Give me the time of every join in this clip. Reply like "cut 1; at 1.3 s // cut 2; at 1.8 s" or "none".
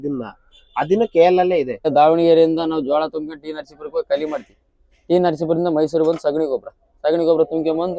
cut 1; at 1.9 s